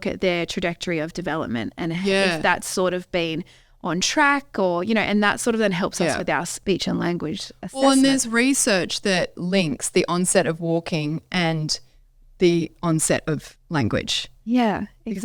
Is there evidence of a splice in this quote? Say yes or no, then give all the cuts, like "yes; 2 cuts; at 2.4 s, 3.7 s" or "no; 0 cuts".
yes; 2 cuts; at 6.6 s, 9.4 s